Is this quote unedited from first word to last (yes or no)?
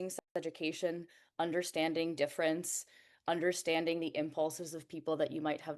yes